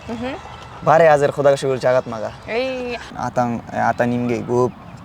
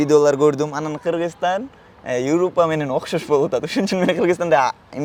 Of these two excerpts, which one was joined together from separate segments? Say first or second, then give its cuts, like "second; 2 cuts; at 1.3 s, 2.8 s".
first; 1 cut; at 3.1 s